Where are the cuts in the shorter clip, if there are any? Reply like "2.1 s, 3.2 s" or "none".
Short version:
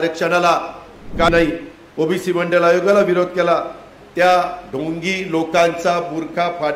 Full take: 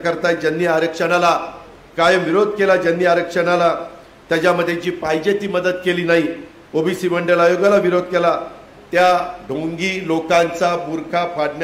1.3 s